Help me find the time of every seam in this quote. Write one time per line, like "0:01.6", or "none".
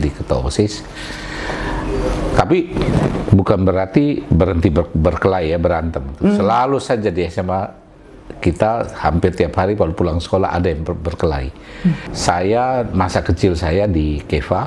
0:12.1